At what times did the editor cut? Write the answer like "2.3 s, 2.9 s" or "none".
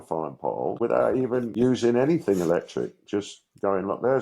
0.8 s, 1.5 s